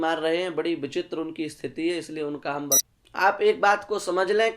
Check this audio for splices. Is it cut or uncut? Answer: cut